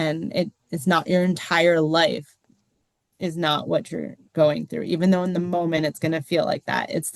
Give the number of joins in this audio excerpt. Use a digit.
1